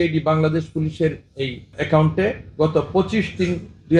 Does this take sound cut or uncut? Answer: uncut